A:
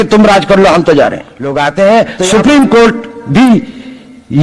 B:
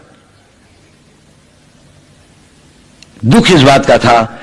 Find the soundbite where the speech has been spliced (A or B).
A